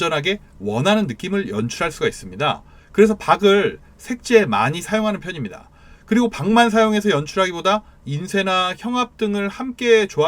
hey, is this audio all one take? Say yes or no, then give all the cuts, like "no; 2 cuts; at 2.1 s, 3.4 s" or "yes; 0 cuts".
yes; 0 cuts